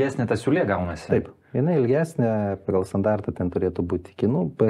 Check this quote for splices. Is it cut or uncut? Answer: uncut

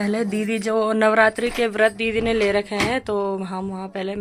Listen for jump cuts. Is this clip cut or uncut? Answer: uncut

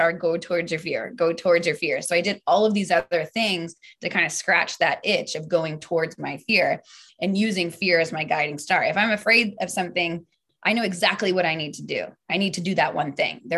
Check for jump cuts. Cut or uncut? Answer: cut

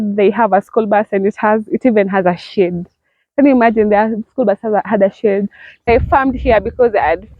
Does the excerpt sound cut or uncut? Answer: cut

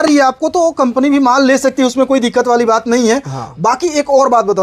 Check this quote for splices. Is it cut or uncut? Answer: uncut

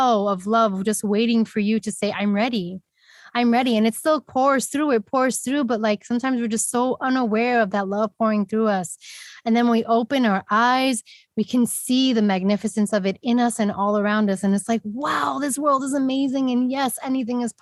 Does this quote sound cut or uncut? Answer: uncut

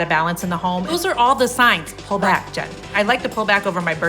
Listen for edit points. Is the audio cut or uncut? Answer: cut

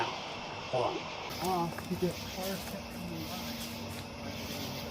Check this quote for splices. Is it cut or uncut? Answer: cut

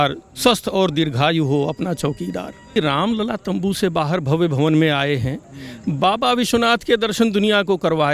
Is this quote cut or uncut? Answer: cut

